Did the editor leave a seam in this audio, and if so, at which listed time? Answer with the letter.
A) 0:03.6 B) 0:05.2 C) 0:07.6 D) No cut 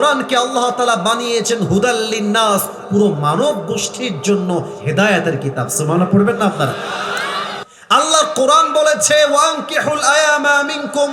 C